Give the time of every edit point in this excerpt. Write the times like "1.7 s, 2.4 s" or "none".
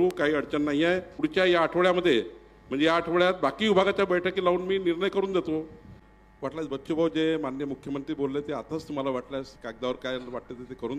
1.2 s, 6.2 s